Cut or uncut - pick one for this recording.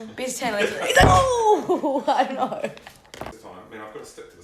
cut